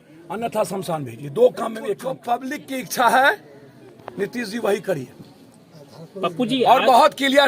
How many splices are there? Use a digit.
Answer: 1